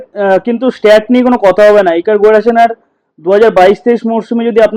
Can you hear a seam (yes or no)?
no